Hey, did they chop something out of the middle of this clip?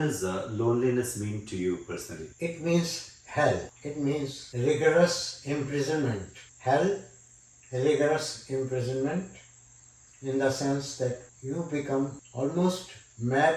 no; 0 cuts

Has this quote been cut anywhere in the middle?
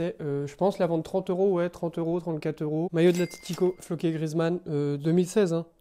yes; 1 cut; at 2.9 s

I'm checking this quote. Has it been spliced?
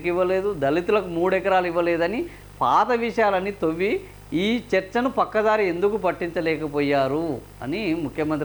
no; 0 cuts

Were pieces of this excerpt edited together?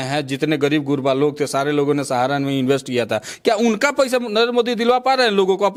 no; 0 cuts

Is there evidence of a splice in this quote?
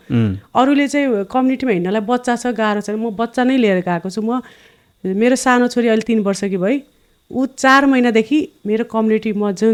no; 0 cuts

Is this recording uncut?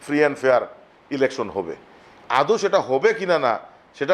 yes; 0 cuts

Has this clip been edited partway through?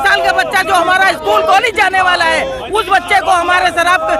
no; 0 cuts

